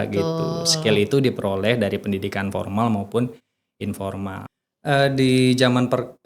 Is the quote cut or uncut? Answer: cut